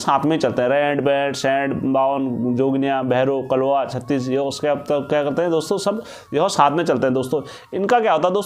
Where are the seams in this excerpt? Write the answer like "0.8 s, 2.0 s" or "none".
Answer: none

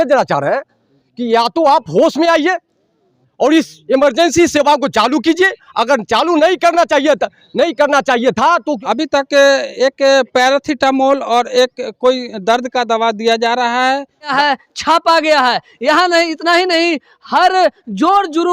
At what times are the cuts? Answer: 8.8 s, 14.3 s

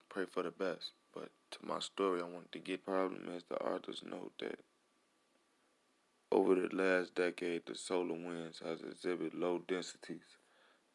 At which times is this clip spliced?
2.8 s

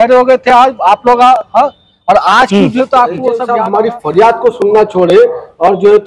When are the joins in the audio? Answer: 3.5 s

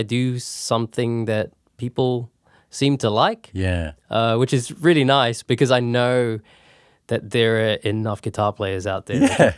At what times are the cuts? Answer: none

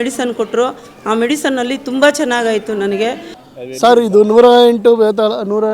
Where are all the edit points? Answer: 3.3 s

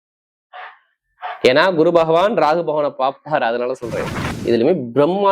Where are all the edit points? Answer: 4.4 s

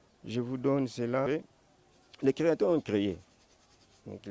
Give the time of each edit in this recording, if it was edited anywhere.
1.3 s

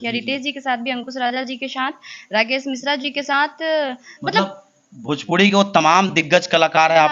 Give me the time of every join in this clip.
none

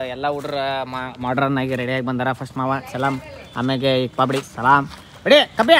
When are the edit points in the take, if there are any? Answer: none

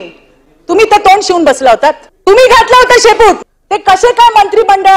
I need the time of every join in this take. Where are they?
2.1 s, 3.4 s

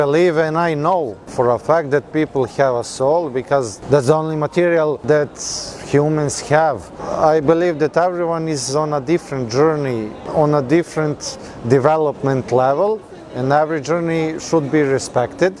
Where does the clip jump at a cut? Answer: 1.2 s, 3.7 s, 5.0 s, 7.0 s, 10.2 s

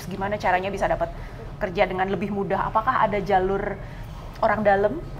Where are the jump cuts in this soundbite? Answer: none

